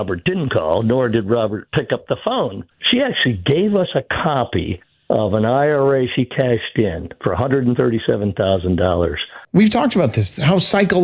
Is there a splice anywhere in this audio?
yes; 2 cuts; at 2.7 s, 9.3 s

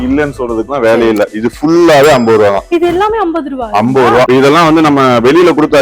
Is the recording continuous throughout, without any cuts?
no; 1 cut; at 4.3 s

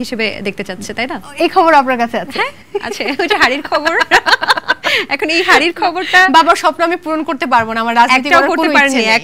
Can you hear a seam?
no; 0 cuts

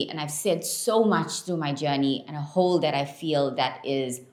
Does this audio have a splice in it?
no; 0 cuts

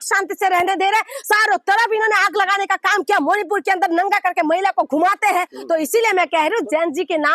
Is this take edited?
yes; 1 cut; at 5.5 s

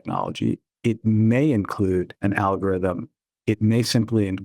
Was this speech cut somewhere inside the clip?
yes; 1 cut; at 2.1 s

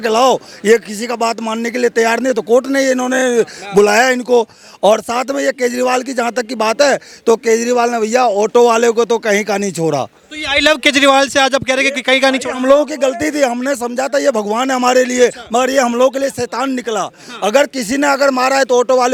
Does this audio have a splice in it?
no; 0 cuts

